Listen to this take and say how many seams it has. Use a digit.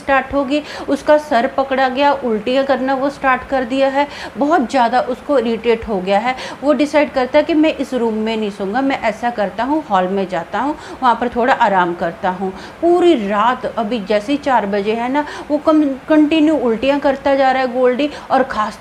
0